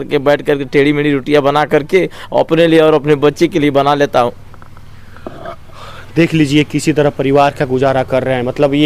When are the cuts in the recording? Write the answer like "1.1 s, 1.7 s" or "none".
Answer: none